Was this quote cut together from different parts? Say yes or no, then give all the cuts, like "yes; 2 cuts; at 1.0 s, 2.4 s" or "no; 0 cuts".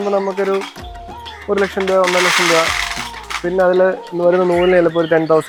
no; 0 cuts